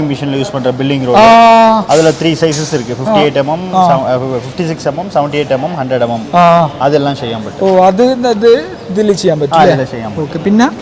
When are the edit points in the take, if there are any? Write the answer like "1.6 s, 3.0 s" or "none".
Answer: none